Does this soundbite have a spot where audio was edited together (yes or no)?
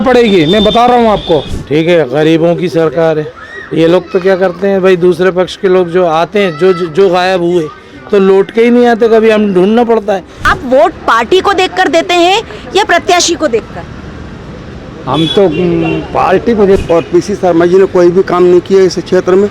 yes